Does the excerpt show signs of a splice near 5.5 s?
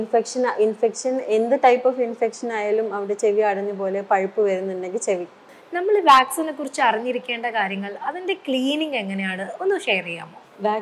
yes; 1 cut; at 5.5 s

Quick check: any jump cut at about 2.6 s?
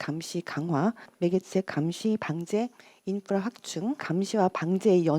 no; 2 cuts; at 1.1 s, 4.0 s

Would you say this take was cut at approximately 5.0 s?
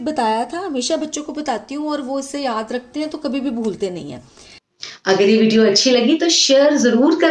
yes; 1 cut; at 5.0 s

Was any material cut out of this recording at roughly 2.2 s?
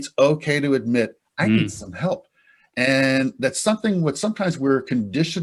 no; 0 cuts

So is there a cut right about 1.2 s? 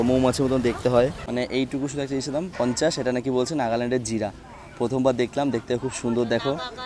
yes; 1 cut; at 1.2 s

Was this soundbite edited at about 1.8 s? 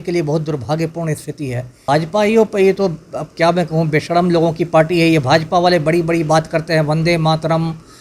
yes; 1 cut; at 1.8 s

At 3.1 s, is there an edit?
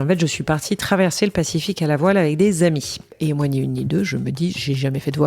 yes; 1 cut; at 3.1 s

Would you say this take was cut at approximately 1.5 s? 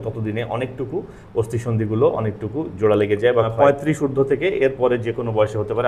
no; 1 cut; at 3.5 s

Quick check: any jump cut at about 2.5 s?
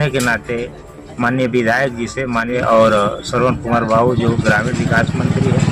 yes; 1 cut; at 2.5 s

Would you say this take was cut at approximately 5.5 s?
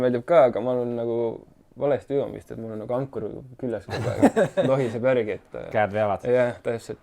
no; 0 cuts

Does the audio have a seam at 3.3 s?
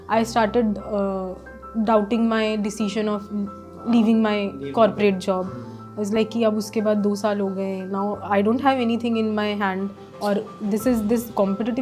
no; 0 cuts

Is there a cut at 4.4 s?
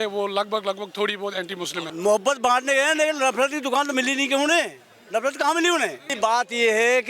no; 2 cuts; at 1.9 s, 6.1 s

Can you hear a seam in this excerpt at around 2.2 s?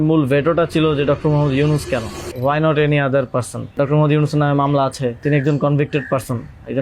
yes; 3 cuts; at 2.2 s, 3.7 s, 5.2 s

